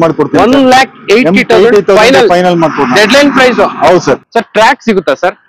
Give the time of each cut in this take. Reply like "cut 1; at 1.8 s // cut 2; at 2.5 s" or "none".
cut 1; at 4.2 s